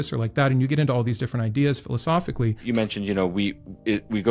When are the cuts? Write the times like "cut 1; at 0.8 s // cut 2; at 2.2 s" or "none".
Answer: cut 1; at 2.6 s